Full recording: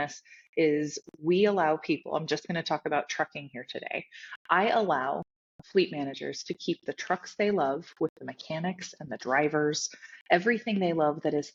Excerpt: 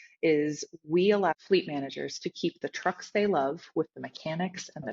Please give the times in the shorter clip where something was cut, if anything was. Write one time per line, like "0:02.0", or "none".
0:01.3